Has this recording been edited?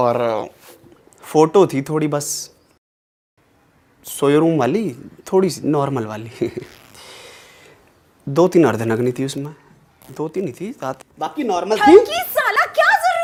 no; 0 cuts

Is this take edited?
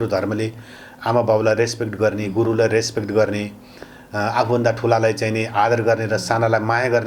no; 0 cuts

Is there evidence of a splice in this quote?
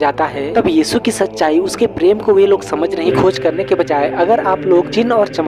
yes; 1 cut; at 3.1 s

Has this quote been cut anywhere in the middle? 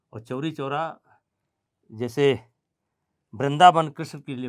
no; 0 cuts

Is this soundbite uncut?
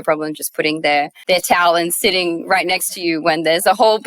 no; 1 cut; at 1.2 s

